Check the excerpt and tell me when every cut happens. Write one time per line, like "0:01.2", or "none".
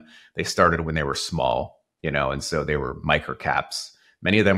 0:01.8